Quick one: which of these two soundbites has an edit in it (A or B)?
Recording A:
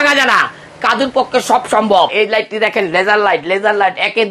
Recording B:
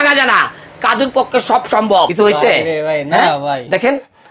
A